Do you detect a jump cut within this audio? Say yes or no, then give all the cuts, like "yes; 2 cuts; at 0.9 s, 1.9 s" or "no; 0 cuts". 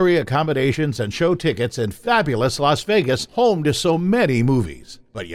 no; 0 cuts